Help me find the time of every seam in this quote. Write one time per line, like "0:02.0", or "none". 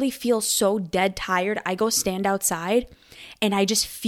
none